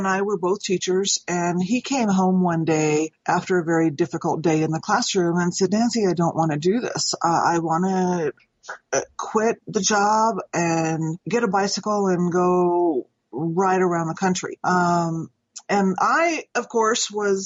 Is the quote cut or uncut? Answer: uncut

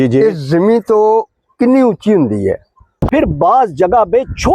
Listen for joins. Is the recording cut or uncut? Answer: cut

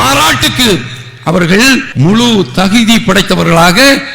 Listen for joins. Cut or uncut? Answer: cut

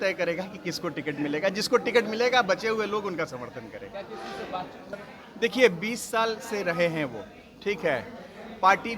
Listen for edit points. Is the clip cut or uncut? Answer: cut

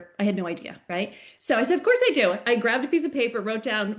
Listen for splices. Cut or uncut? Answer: uncut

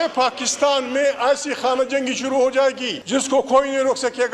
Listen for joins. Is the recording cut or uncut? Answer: cut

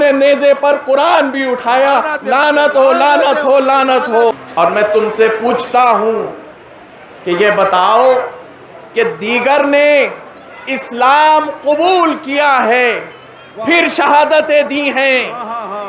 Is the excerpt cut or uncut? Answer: cut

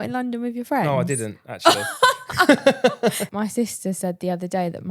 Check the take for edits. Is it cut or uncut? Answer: cut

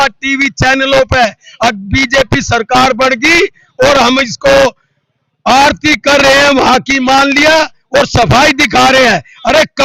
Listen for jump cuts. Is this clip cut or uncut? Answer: uncut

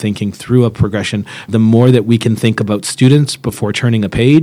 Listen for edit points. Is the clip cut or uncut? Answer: cut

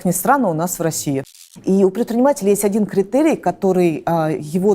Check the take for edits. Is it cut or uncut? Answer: cut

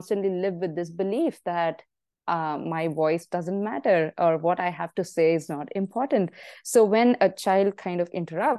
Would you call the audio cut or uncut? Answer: uncut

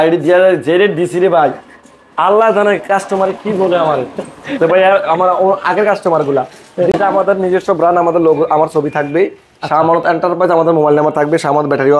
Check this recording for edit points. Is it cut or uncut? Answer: cut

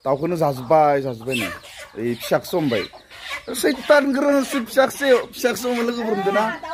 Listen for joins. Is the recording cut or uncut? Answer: uncut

